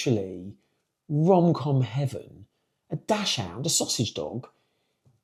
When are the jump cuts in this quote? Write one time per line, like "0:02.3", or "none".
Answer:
none